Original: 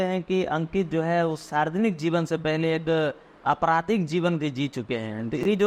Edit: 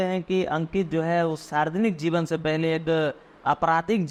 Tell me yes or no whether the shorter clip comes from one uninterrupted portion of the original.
yes